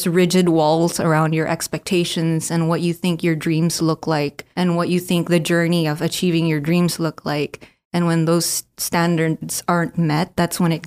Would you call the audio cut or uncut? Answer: uncut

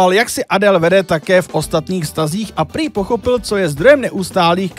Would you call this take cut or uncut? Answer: uncut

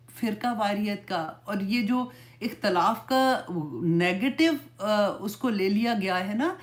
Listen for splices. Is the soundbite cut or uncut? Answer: uncut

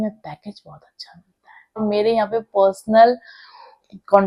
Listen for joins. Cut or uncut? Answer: cut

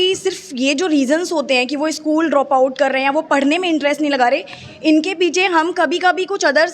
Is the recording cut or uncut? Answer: uncut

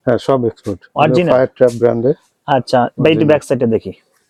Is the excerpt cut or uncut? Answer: uncut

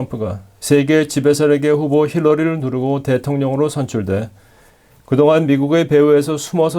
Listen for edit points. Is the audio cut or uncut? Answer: uncut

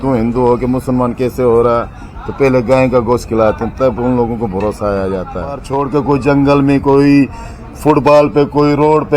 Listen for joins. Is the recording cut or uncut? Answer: cut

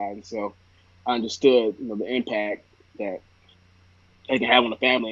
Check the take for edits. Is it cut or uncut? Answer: uncut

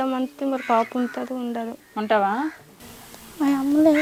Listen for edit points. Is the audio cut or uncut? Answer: uncut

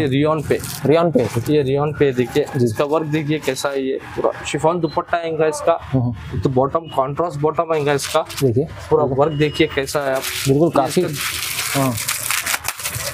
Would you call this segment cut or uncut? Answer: uncut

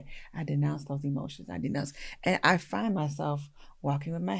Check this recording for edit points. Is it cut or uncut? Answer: uncut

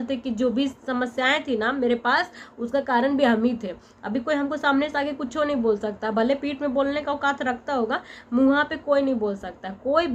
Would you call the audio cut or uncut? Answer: uncut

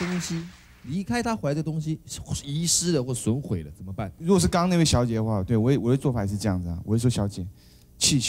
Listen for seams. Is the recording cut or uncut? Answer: cut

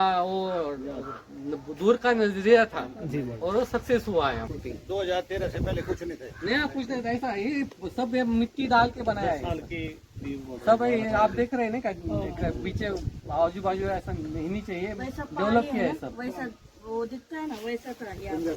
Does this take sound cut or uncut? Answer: cut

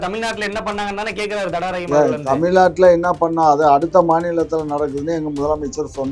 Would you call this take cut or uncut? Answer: uncut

